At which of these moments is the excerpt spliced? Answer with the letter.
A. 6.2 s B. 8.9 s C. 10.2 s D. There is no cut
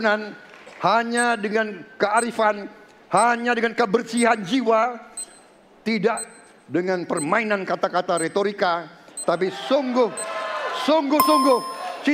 D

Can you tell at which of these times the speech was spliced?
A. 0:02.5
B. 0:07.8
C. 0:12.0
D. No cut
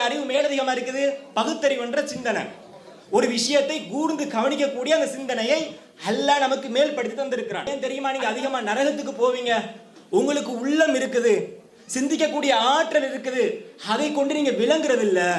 B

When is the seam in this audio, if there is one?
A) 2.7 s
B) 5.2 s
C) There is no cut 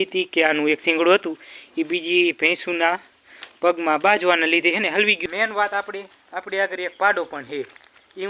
B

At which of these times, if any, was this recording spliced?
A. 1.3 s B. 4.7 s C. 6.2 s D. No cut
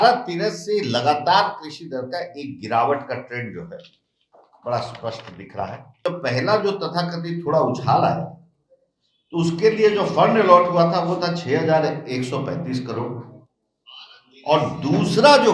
C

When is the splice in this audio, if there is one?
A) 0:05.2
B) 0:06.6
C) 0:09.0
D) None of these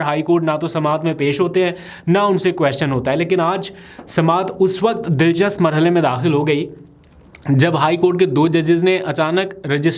D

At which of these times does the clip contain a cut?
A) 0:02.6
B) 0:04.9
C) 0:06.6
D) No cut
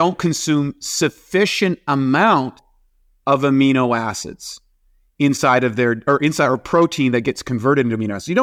D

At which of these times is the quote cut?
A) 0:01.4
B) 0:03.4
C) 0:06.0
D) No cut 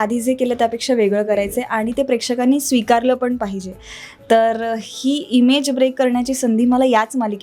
D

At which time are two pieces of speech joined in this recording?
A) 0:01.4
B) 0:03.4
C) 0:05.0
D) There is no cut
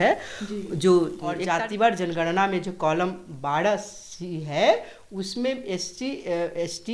A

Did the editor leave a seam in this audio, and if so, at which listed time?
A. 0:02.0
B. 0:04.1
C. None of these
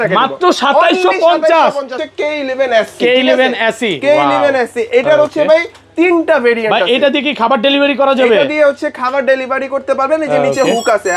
A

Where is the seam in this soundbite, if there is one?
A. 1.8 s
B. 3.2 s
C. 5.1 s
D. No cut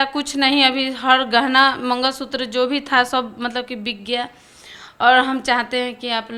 D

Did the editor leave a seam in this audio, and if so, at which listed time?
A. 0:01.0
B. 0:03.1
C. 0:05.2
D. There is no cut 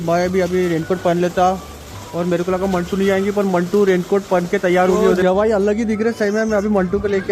C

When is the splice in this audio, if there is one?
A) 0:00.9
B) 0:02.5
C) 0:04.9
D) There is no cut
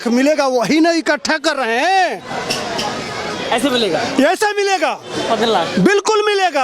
D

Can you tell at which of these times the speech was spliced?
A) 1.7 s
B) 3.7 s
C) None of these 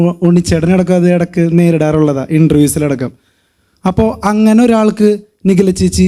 C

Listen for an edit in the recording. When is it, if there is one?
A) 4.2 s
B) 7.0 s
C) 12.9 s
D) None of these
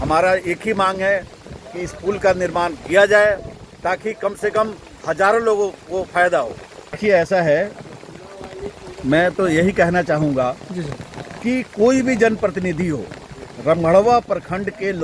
B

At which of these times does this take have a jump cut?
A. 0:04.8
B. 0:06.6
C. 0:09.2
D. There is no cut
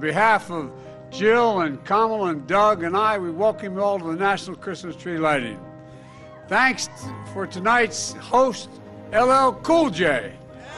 D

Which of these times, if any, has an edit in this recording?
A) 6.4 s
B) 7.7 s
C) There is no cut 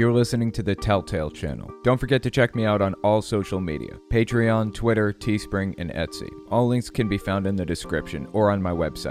C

